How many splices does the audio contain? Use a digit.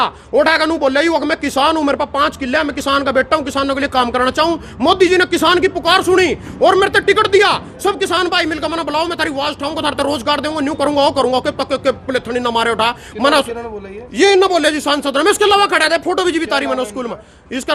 0